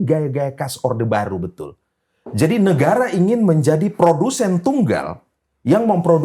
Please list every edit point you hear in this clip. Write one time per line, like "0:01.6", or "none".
none